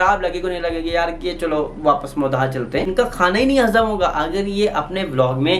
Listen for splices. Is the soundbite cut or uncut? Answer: cut